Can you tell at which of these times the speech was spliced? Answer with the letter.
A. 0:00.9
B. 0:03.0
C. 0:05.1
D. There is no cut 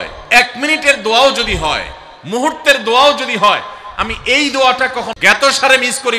C